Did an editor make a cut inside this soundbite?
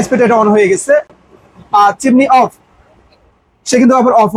no; 0 cuts

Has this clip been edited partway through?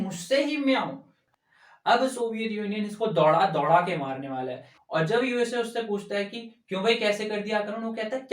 yes; 2 cuts; at 1.2 s, 4.7 s

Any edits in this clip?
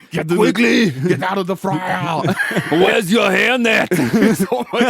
yes; 1 cut; at 2.7 s

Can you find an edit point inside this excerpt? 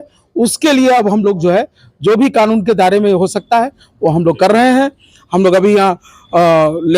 no; 0 cuts

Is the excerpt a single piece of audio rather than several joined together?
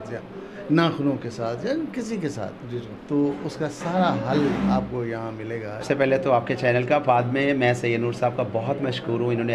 no; 1 cut; at 5.8 s

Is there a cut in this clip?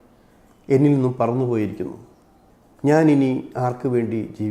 no; 0 cuts

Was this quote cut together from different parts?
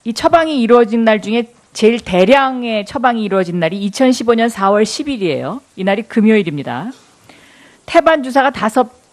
yes; 1 cut; at 2.9 s

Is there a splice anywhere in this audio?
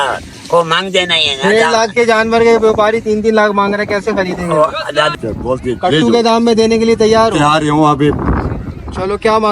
yes; 1 cut; at 5.1 s

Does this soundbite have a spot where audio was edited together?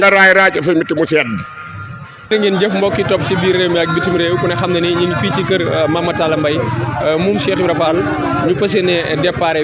yes; 1 cut; at 2.2 s

